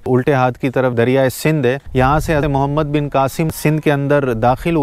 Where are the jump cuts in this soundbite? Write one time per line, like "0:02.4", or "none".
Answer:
none